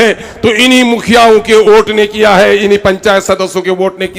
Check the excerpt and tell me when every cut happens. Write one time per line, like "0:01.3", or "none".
none